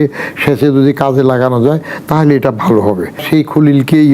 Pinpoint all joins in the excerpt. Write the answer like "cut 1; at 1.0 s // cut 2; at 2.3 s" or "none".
cut 1; at 3.2 s